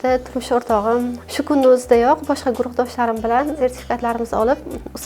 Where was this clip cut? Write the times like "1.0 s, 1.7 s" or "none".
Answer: 1.2 s